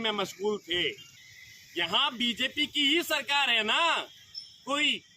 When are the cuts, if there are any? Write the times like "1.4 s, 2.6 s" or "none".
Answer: 1.1 s